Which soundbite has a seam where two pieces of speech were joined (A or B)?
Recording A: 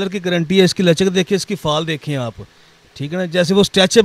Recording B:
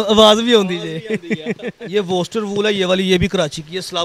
B